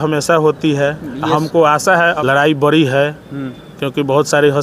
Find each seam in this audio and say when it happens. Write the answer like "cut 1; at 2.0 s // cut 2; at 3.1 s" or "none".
none